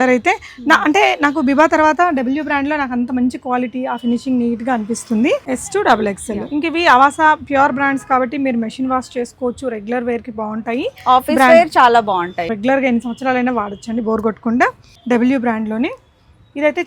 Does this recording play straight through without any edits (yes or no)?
no